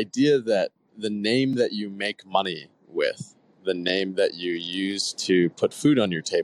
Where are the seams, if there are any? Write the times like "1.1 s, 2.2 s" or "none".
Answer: none